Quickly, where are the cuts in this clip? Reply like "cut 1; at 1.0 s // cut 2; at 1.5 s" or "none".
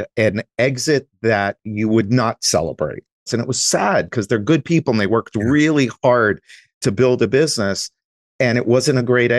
cut 1; at 3.3 s